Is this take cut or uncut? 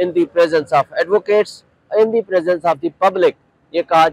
uncut